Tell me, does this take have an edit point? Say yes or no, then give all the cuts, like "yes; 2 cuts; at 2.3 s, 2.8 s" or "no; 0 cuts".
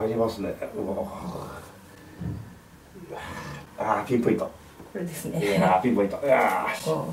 no; 0 cuts